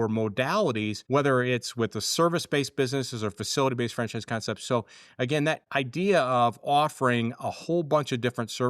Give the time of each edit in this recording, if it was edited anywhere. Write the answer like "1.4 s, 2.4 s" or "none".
1.0 s